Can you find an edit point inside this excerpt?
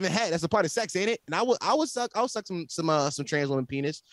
no; 0 cuts

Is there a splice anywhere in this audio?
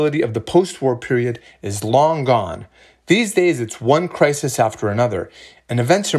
no; 0 cuts

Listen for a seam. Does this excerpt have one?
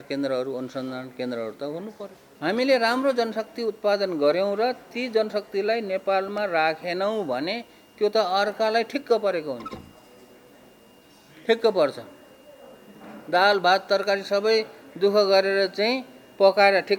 yes; 1 cut; at 2.2 s

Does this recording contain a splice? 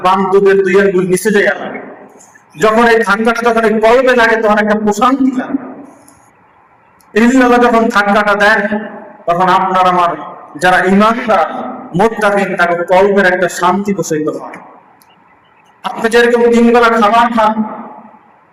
no; 0 cuts

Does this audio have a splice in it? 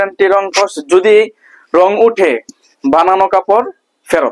no; 0 cuts

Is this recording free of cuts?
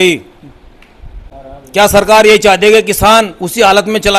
yes; 0 cuts

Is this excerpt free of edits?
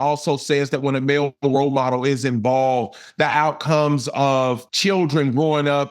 no; 1 cut; at 4.7 s

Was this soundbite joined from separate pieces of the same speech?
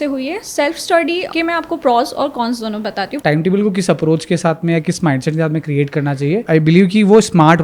yes; 3 cuts; at 1.3 s, 3.1 s, 6.4 s

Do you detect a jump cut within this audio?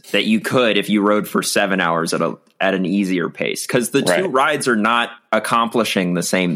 yes; 1 cut; at 5.1 s

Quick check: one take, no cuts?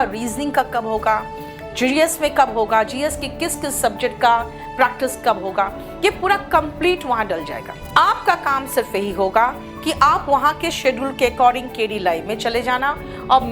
no; 1 cut; at 7.7 s

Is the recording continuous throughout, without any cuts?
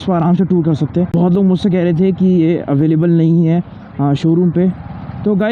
no; 1 cut; at 1.1 s

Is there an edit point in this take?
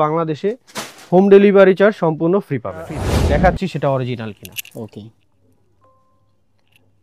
yes; 1 cut; at 3.1 s

